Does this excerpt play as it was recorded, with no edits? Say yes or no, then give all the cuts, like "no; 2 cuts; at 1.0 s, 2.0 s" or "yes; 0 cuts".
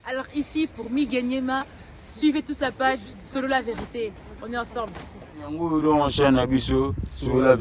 yes; 0 cuts